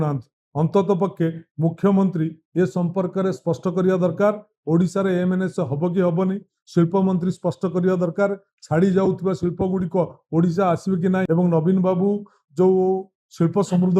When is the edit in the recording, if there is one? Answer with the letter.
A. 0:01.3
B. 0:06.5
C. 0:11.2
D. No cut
C